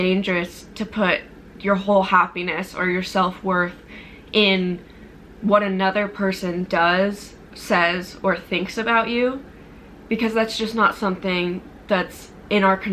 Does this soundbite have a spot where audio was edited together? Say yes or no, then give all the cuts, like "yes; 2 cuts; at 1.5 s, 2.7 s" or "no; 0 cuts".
no; 0 cuts